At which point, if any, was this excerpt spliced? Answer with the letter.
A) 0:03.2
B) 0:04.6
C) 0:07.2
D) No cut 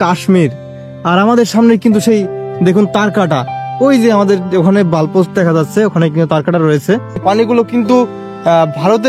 C